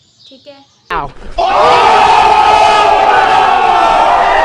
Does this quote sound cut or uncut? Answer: uncut